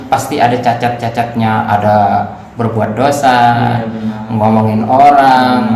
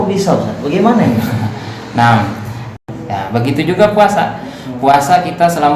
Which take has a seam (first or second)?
second